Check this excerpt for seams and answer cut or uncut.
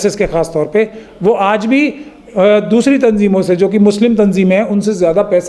uncut